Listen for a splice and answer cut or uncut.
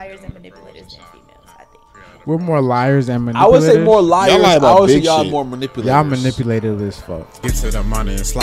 cut